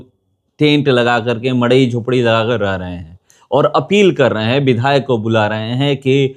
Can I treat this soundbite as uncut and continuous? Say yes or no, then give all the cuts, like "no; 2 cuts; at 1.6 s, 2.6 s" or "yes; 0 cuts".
yes; 0 cuts